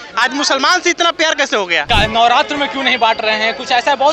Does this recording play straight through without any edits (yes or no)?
no